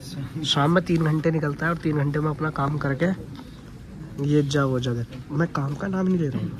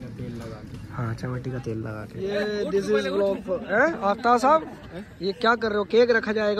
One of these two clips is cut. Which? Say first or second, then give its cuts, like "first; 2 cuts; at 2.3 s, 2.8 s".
second; 1 cut; at 2.1 s